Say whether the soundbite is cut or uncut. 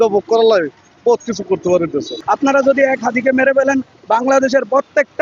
cut